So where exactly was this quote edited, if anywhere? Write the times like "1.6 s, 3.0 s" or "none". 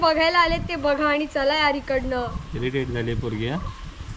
none

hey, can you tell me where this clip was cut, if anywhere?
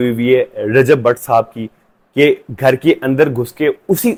none

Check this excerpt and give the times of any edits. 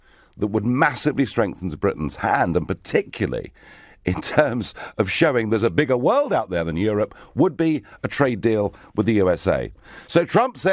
1.6 s

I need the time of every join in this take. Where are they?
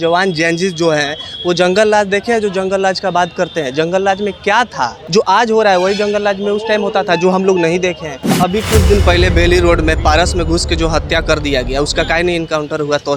5.0 s, 8.4 s

